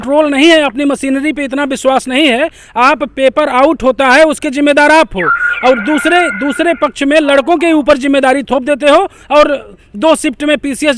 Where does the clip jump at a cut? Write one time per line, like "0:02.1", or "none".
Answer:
none